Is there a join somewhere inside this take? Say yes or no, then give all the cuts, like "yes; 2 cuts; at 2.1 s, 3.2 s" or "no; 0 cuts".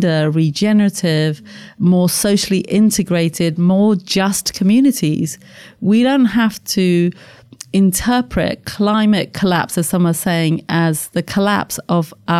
no; 0 cuts